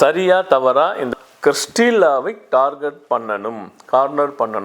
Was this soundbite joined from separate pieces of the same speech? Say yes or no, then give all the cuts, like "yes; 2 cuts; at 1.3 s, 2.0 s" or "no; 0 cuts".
yes; 1 cut; at 1.1 s